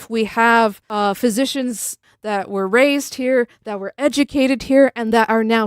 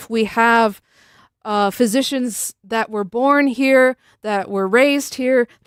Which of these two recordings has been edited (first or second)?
first